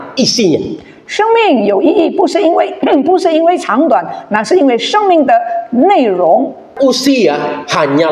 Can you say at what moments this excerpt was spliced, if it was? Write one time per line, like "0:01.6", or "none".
0:06.7